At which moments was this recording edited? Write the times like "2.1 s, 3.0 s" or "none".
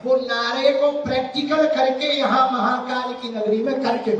none